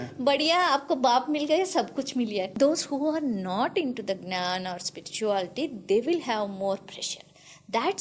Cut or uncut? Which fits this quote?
cut